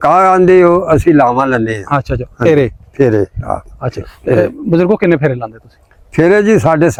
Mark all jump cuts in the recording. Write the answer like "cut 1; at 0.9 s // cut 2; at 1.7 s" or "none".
none